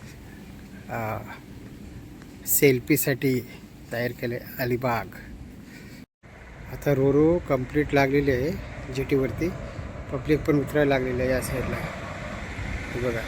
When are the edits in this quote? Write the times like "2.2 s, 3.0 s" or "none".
6.1 s